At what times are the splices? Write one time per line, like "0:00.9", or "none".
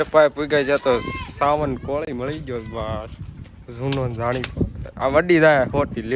none